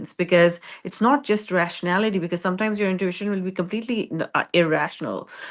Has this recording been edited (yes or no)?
no